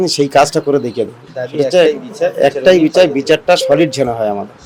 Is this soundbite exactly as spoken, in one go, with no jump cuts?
yes; 0 cuts

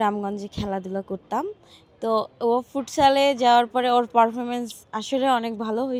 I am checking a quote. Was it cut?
no; 0 cuts

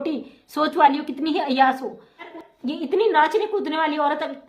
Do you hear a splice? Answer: yes; 1 cut; at 2.3 s

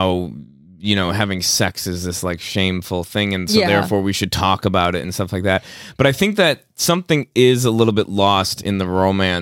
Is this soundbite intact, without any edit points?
yes; 0 cuts

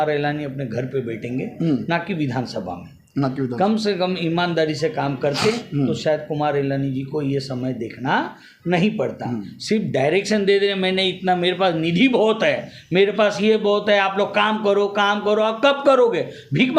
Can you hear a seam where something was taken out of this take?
no; 0 cuts

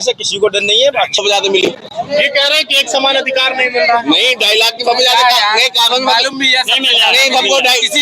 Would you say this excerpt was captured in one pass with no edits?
no; 1 cut; at 1.2 s

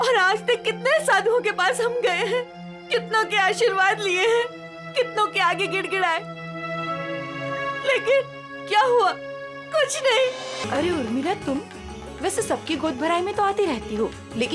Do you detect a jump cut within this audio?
yes; 1 cut; at 10.6 s

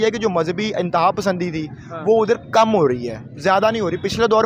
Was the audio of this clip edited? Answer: no; 0 cuts

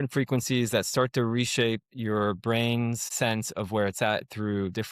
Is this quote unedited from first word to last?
no; 1 cut; at 3.1 s

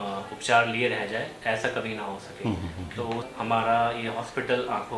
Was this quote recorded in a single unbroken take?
no; 1 cut; at 3.3 s

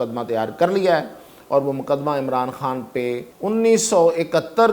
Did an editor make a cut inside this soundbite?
yes; 1 cut; at 3.3 s

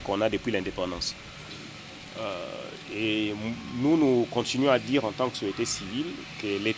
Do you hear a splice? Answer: no; 0 cuts

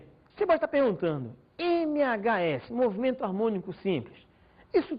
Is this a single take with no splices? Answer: no; 1 cut; at 2.8 s

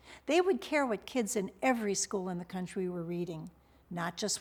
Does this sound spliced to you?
no; 0 cuts

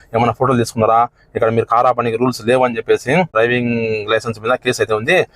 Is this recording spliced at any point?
yes; 1 cut; at 3.3 s

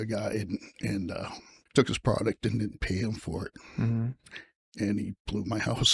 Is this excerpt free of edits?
yes; 0 cuts

